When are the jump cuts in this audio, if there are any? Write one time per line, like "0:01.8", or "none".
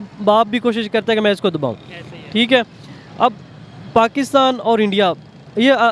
none

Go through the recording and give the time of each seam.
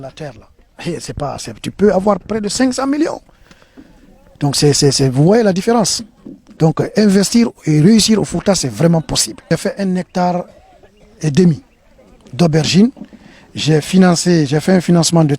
0:09.5

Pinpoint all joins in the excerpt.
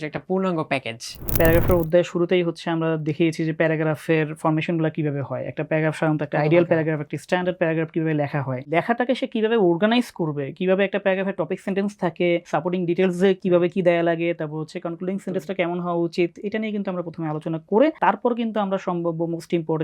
0:01.3
0:08.7
0:12.4
0:18.0

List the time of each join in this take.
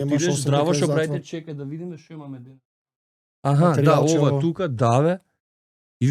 none

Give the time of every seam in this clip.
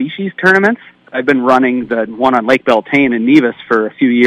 0:00.9

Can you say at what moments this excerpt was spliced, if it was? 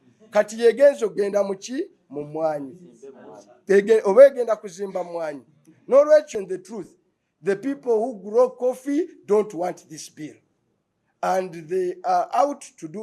0:06.3

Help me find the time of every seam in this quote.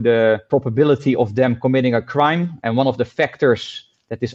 none

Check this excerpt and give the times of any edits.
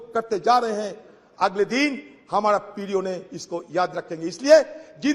none

